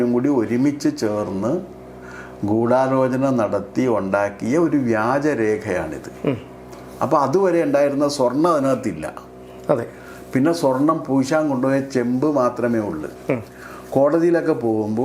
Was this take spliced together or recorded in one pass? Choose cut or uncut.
uncut